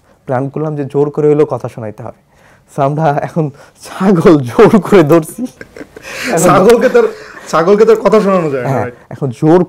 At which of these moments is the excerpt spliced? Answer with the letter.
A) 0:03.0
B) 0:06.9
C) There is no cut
C